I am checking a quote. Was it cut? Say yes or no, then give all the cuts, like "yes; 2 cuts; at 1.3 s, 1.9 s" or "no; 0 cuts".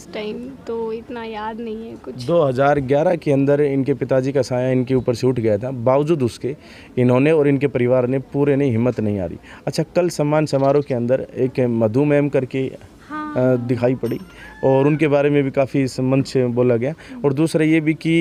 no; 0 cuts